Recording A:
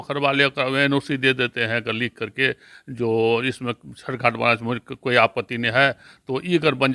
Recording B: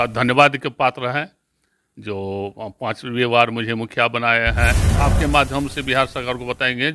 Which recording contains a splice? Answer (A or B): B